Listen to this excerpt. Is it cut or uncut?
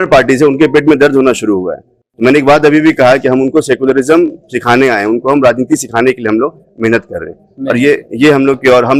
uncut